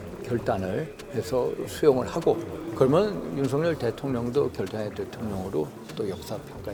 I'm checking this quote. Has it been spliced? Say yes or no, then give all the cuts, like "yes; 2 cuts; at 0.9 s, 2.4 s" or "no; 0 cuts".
no; 0 cuts